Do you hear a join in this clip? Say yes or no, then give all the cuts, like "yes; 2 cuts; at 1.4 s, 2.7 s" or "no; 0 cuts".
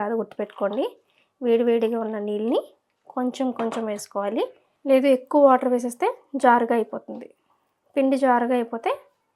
yes; 1 cut; at 4.7 s